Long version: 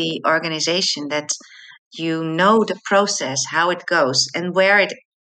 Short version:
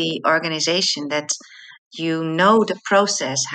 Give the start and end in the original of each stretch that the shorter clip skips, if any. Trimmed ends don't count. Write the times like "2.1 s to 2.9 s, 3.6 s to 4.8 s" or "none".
none